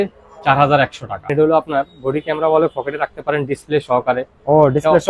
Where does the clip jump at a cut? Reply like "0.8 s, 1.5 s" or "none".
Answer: 1.3 s